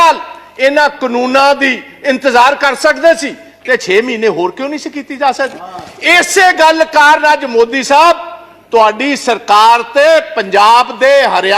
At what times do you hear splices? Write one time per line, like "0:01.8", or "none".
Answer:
none